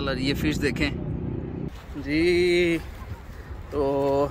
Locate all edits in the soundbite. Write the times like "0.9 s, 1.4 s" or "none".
1.7 s